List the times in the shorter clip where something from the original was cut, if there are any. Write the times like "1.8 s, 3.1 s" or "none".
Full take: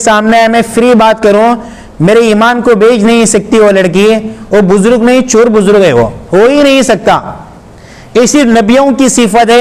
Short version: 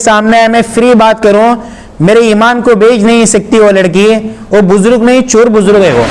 none